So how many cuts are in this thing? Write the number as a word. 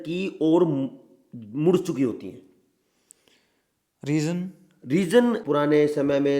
one